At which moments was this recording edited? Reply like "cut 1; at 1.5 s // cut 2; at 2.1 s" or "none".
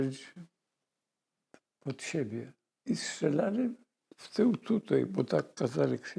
cut 1; at 2.6 s